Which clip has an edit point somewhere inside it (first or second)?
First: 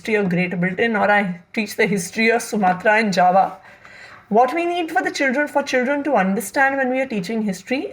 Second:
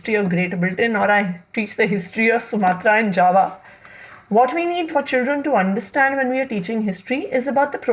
second